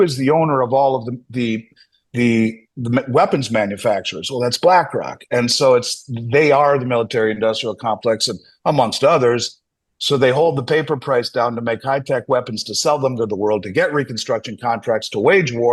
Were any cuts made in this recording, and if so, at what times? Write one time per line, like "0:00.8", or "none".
none